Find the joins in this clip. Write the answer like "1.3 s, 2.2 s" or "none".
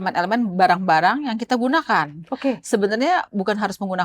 none